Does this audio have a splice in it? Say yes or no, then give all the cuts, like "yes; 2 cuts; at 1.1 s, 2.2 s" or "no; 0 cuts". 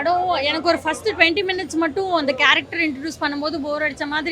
no; 0 cuts